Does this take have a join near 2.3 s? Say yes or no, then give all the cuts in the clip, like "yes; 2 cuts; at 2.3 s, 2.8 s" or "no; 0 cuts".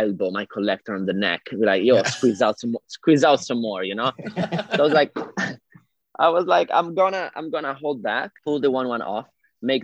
no; 1 cut; at 8.3 s